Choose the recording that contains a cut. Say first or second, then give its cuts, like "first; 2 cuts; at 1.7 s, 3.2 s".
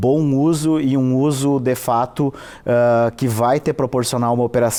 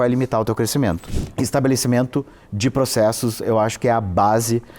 second; 1 cut; at 1.1 s